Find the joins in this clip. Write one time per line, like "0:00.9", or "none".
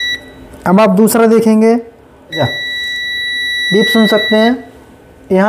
0:02.4